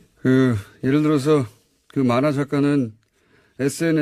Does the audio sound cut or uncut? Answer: uncut